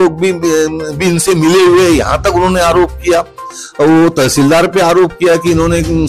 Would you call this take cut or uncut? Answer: uncut